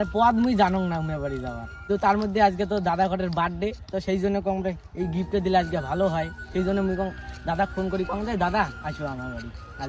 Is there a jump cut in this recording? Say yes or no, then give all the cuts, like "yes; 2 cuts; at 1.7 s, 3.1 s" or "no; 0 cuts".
yes; 1 cut; at 1.8 s